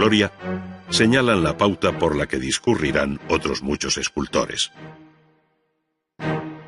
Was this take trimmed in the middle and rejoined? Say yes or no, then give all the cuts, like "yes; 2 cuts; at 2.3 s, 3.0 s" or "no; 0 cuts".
no; 0 cuts